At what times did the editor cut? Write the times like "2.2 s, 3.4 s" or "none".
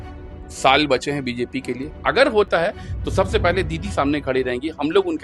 1.9 s